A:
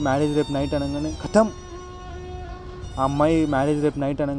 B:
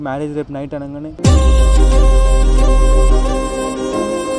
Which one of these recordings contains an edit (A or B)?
B